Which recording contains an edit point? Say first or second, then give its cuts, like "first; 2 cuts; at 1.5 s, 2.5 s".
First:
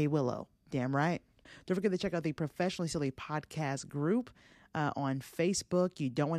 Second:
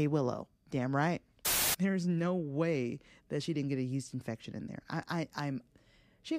second; 1 cut; at 1.5 s